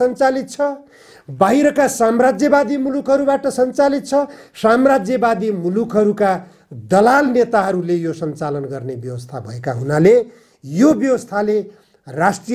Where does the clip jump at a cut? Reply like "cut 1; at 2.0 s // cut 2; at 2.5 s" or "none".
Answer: none